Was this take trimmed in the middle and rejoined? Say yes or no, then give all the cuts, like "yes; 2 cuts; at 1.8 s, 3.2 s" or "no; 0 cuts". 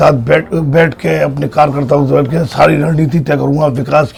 no; 0 cuts